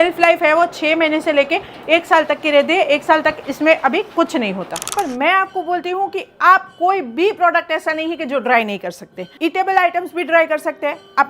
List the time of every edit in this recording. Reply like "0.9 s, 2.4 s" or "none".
4.9 s, 9.3 s